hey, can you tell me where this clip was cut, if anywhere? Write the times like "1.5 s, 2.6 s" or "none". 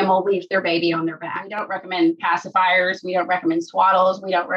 1.5 s

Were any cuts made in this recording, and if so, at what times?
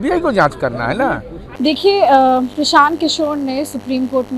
none

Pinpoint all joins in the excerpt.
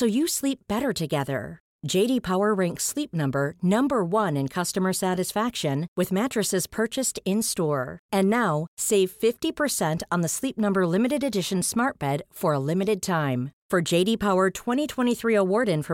none

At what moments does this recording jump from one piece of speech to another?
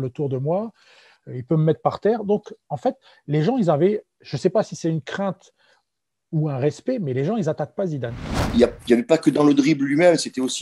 8.5 s

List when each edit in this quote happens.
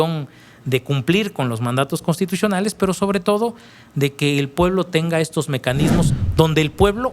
6.2 s

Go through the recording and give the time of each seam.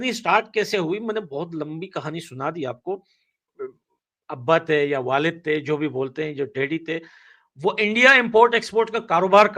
3.5 s

